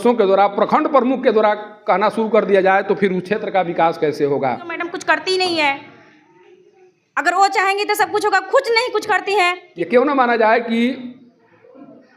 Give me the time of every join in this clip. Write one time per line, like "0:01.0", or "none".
0:04.9
0:09.7